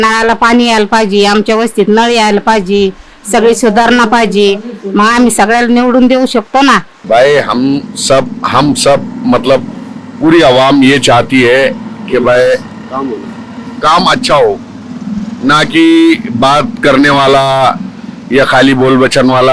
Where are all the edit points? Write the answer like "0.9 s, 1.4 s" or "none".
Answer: none

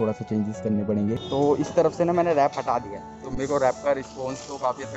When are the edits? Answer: 1.2 s

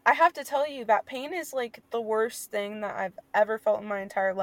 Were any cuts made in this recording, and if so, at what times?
1.8 s, 3.2 s

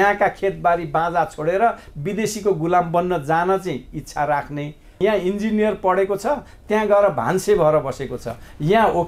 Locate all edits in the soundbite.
5.0 s

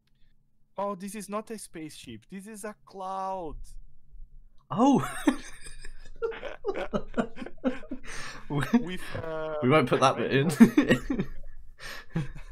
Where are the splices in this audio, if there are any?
none

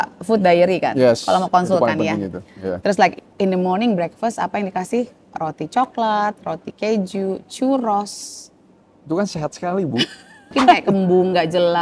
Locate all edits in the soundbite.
10.8 s

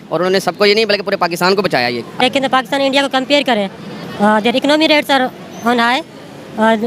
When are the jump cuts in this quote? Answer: 2.2 s

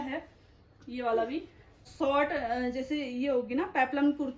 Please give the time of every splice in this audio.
1.9 s

